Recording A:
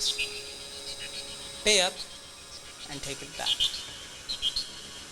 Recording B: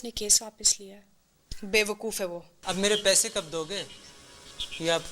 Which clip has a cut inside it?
B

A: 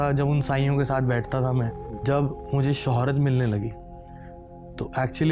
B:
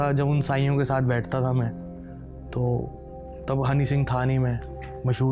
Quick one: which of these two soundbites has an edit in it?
A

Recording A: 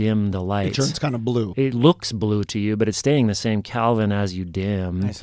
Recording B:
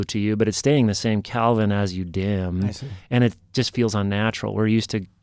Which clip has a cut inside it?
A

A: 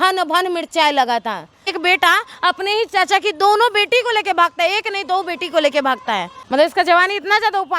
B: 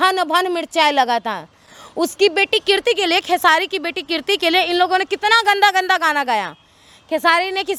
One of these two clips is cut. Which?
A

